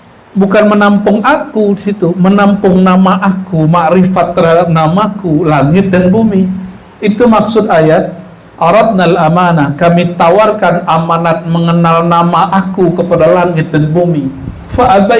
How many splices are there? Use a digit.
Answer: 0